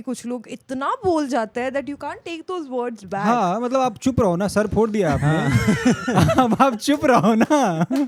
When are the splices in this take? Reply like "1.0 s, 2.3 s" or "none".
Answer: none